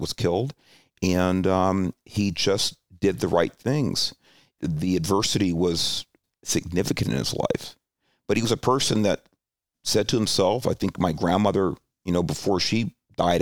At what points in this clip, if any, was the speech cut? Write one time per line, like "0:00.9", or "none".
0:04.5
0:06.2
0:09.7